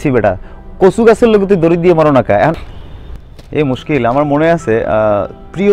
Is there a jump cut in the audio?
yes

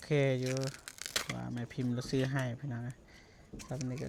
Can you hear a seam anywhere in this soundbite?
no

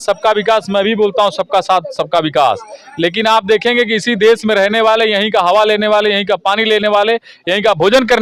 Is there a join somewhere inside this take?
no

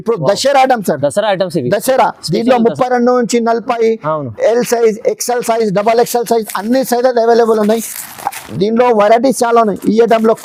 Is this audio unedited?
yes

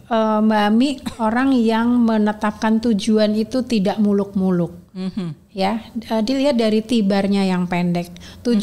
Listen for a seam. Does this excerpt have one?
no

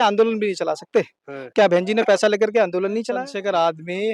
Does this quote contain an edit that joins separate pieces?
yes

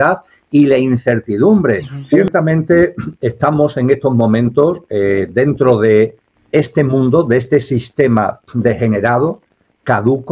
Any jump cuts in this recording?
yes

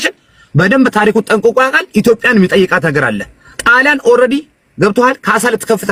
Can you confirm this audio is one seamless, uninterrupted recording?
yes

